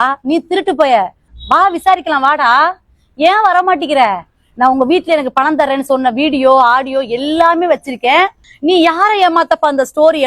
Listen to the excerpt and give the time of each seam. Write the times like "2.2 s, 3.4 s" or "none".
1.3 s, 8.4 s